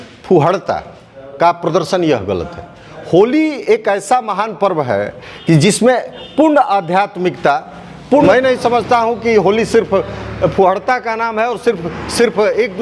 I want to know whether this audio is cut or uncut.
cut